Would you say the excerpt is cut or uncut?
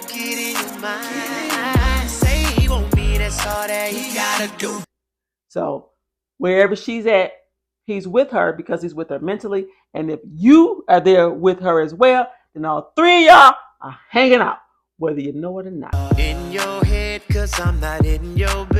uncut